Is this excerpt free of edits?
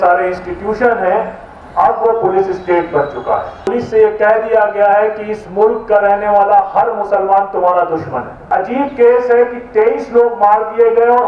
no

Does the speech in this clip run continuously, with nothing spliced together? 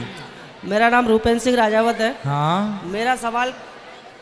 yes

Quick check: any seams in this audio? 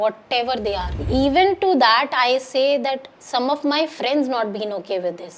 yes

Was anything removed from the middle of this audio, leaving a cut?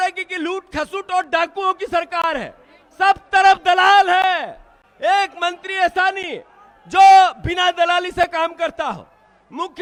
no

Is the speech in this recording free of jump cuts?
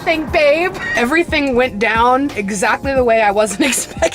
no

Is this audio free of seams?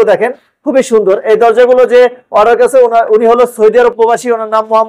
yes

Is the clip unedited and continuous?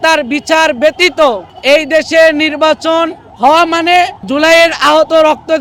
yes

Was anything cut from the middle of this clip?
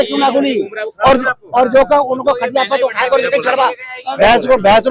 no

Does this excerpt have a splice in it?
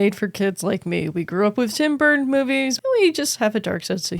yes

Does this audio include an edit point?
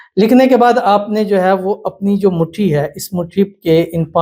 no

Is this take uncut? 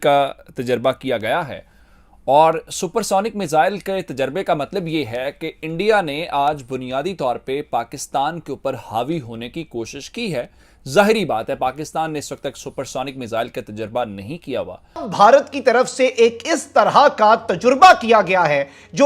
no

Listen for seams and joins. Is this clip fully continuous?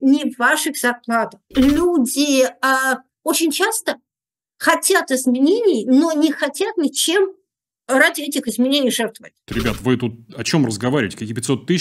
no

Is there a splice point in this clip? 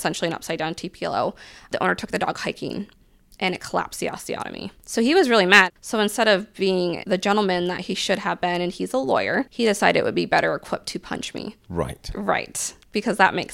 yes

